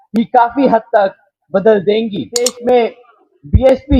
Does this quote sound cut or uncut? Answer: cut